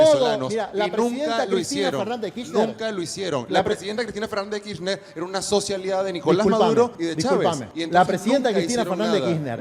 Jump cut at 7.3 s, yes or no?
yes